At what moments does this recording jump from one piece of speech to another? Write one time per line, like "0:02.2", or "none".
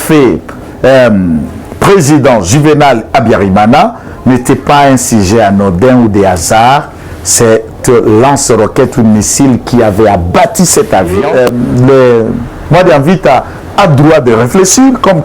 0:11.2